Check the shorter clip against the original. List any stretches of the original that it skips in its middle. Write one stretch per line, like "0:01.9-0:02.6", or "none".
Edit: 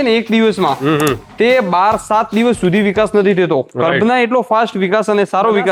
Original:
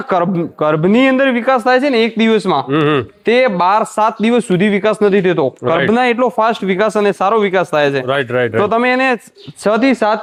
none